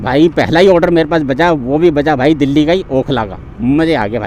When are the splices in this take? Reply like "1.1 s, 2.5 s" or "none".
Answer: none